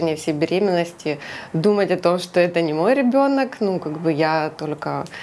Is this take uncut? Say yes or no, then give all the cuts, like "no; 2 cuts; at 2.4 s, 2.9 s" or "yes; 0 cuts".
yes; 0 cuts